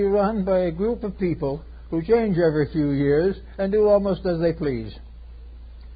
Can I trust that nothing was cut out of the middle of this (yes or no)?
no